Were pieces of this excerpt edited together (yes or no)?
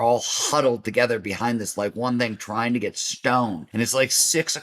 yes